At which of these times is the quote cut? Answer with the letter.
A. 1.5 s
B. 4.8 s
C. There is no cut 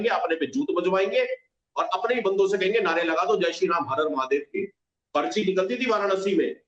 B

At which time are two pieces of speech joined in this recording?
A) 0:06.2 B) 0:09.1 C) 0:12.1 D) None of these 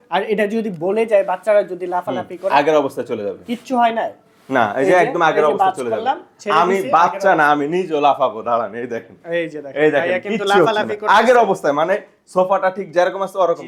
D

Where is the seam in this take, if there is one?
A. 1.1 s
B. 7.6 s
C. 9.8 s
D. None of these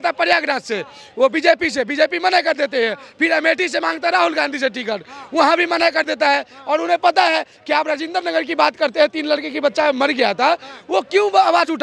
D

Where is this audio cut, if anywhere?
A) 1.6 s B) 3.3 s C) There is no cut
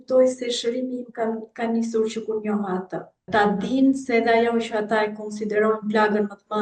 B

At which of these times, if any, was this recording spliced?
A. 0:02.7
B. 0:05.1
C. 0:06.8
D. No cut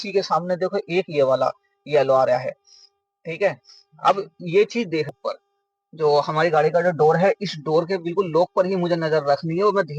B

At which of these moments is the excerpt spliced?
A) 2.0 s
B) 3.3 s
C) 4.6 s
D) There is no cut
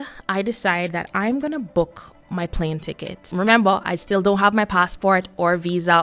B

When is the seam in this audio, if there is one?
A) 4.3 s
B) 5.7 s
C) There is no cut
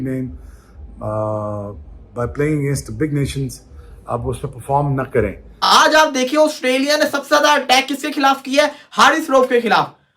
B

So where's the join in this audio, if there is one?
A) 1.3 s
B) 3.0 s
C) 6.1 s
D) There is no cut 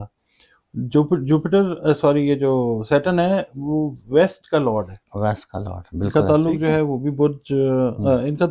C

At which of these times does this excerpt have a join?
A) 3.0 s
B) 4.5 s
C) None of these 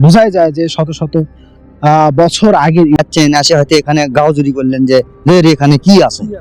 A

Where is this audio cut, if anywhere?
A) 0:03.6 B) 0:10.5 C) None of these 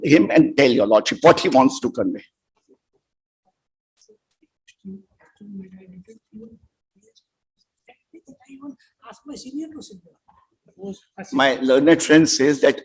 C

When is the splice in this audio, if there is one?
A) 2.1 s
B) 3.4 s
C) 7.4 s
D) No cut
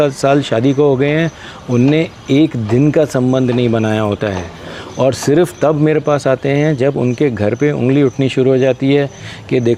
D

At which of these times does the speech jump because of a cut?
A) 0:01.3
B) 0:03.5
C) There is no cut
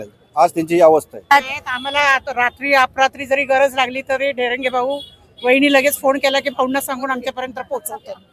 A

